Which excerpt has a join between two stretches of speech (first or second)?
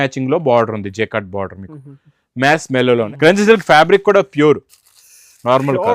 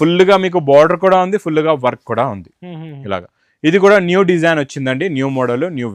first